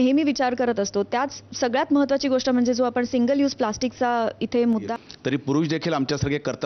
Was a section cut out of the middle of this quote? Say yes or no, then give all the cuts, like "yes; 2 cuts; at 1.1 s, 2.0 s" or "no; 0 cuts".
yes; 1 cut; at 4.9 s